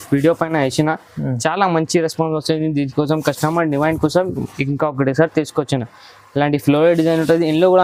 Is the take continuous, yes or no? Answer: yes